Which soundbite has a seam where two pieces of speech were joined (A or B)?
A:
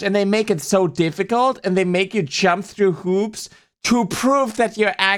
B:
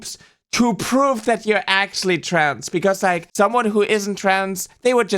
B